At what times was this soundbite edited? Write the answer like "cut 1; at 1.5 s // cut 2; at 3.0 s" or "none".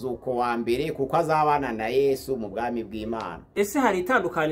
cut 1; at 3.5 s